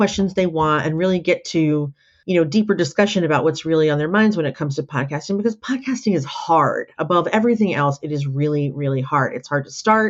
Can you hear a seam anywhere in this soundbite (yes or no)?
no